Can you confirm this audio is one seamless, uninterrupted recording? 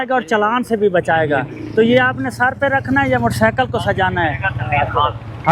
yes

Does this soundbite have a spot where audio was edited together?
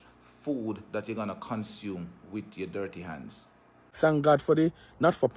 yes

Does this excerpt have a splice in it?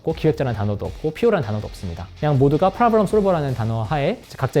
no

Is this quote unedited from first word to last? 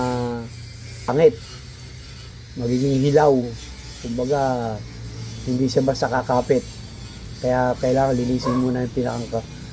no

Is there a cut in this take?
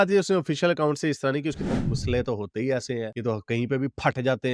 yes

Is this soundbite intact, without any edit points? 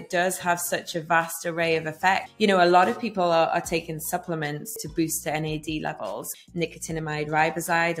no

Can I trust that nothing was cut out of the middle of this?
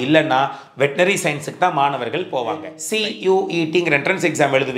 no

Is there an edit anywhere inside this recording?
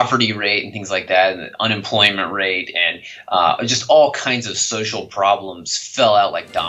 no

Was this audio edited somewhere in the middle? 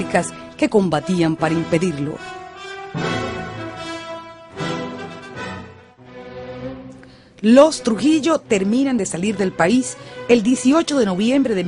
yes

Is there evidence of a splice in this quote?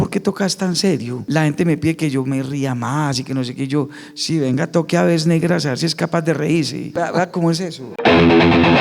yes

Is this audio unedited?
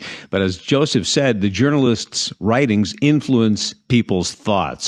yes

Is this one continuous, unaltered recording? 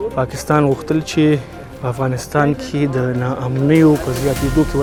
yes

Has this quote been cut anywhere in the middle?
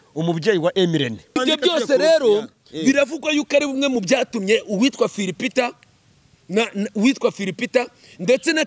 yes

